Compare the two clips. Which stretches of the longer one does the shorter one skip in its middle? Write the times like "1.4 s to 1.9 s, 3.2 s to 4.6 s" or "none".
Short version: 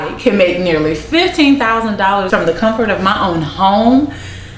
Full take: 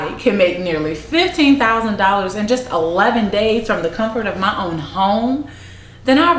2.3 s to 3.7 s